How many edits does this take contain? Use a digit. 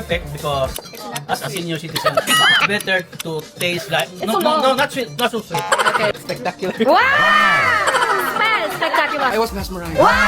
3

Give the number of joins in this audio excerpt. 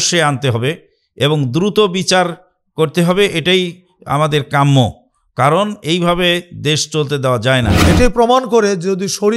1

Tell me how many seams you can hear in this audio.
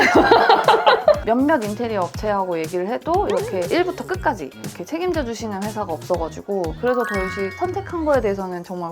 2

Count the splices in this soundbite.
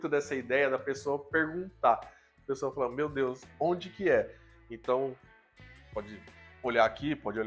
0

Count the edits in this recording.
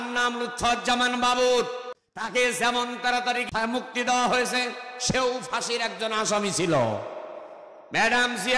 1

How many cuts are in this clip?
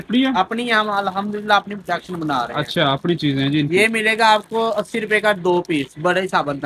0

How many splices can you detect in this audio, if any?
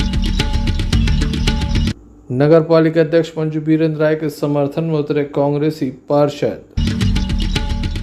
1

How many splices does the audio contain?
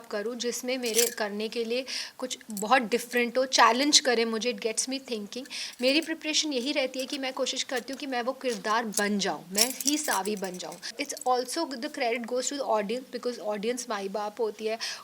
1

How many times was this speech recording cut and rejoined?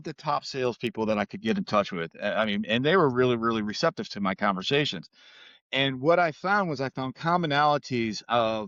0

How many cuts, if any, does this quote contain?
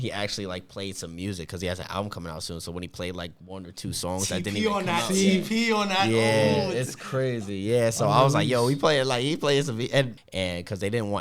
1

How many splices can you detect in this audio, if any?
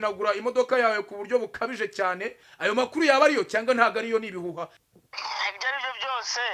2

